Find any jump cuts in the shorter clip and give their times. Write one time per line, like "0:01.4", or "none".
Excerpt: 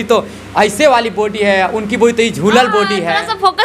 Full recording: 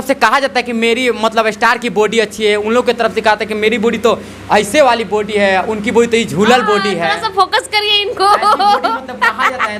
none